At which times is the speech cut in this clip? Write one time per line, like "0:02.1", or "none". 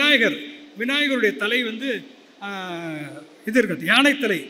none